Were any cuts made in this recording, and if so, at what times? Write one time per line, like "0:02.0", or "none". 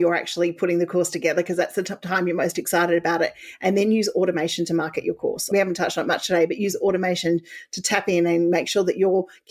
none